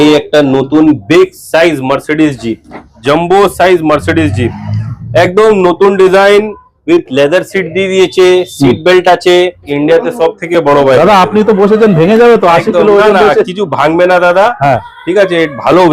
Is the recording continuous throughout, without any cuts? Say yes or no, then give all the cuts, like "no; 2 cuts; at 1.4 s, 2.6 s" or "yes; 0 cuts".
no; 2 cuts; at 2.9 s, 9.7 s